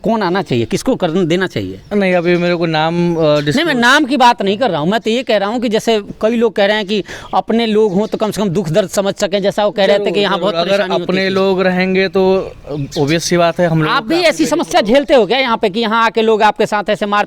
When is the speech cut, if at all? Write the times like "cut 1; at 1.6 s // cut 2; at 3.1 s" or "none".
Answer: none